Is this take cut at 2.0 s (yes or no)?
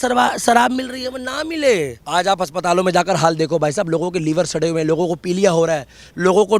yes